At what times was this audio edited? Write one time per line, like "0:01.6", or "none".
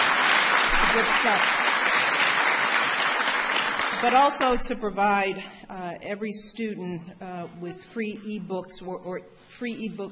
0:04.8